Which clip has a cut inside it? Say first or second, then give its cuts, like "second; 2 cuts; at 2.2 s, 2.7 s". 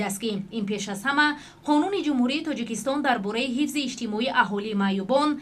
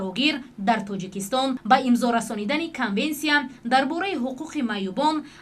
second; 1 cut; at 1.6 s